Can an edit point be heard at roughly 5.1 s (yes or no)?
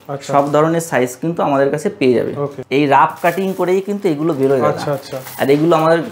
no